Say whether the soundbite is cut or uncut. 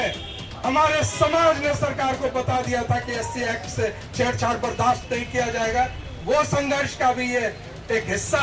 uncut